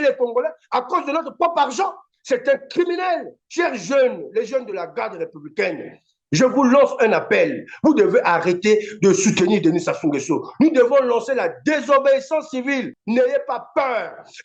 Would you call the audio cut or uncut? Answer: uncut